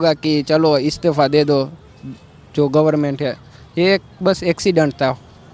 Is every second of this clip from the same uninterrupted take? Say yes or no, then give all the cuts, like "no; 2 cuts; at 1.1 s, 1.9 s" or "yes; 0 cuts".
yes; 0 cuts